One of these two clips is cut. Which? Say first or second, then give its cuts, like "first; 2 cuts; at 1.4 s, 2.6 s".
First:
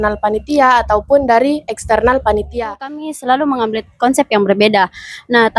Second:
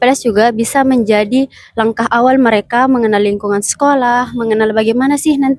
first; 1 cut; at 3.1 s